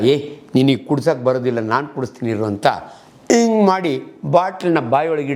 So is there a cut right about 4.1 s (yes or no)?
no